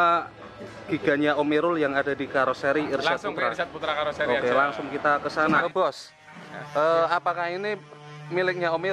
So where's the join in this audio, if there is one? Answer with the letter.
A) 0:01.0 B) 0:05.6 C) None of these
B